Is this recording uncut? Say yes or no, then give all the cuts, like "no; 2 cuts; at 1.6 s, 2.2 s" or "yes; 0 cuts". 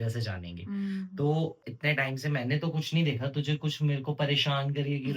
no; 1 cut; at 1.7 s